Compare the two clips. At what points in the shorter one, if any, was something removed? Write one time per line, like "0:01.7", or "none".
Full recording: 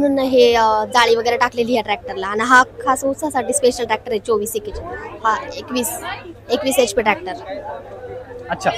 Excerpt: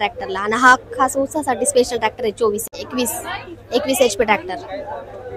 0:02.7